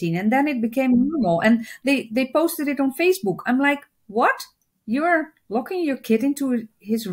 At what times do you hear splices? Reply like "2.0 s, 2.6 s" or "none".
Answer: none